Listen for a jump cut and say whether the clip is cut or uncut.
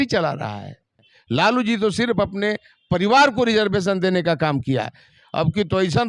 cut